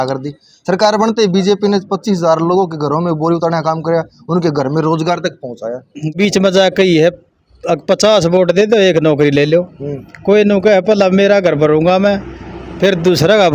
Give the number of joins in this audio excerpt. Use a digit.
1